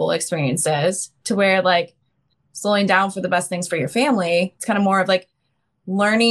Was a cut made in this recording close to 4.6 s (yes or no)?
yes